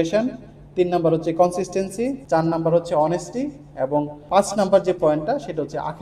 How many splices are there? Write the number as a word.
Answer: zero